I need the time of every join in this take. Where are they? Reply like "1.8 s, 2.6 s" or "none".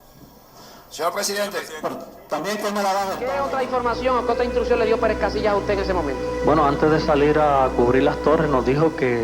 3.2 s